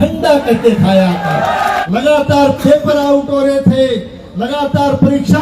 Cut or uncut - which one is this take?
cut